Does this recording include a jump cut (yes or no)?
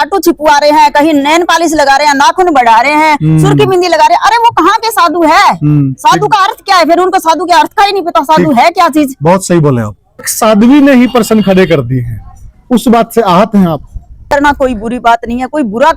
yes